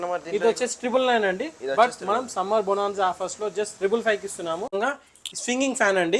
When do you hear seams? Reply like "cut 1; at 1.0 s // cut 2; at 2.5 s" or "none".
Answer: cut 1; at 4.8 s